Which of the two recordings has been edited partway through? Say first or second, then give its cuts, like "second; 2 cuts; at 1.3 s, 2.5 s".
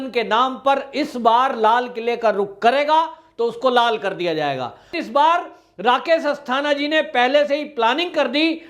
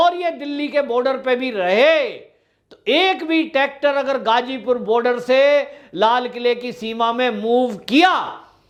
first; 1 cut; at 4.9 s